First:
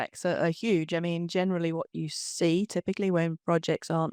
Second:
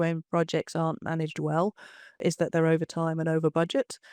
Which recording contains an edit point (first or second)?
second